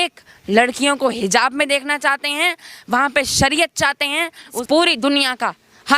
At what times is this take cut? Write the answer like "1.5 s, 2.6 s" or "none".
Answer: 4.6 s